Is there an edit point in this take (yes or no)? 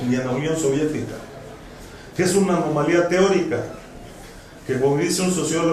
no